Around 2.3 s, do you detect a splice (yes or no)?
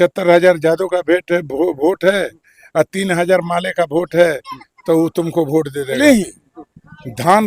no